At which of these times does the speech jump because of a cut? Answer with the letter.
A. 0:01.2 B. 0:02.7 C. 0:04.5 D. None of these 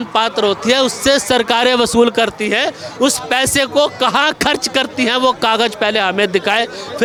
D